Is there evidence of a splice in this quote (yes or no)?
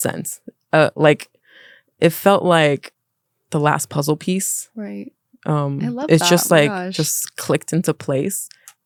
no